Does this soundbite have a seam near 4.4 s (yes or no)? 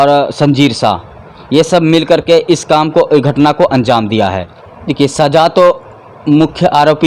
yes